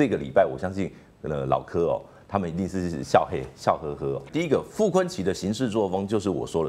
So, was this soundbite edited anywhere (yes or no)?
yes